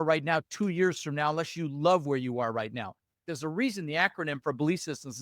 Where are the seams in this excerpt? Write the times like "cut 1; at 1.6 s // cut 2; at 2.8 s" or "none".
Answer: cut 1; at 3.3 s